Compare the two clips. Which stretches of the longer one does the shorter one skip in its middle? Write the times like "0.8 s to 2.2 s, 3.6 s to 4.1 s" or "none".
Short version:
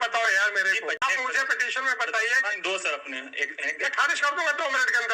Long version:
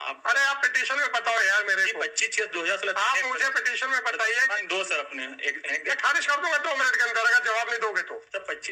2.1 s to 3.1 s